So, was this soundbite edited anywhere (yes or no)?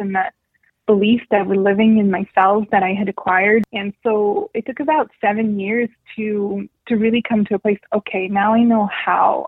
yes